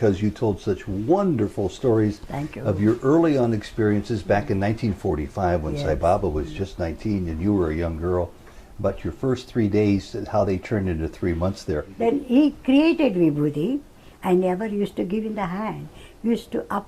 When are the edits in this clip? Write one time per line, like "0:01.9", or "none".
0:11.9